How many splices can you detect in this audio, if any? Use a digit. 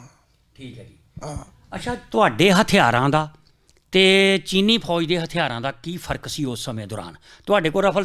0